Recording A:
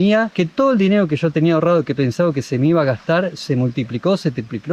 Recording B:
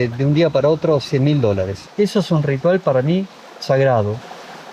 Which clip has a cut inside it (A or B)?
B